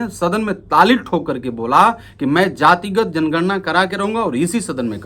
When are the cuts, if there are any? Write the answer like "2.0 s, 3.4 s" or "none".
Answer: none